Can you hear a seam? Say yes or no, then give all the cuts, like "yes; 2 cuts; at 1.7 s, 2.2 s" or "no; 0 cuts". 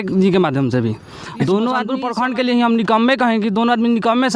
yes; 1 cut; at 2.0 s